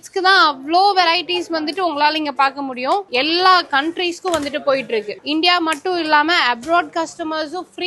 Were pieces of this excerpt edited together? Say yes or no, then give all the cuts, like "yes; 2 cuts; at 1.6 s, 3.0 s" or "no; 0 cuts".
yes; 2 cuts; at 3.1 s, 5.1 s